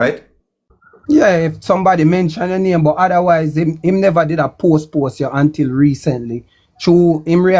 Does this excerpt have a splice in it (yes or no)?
no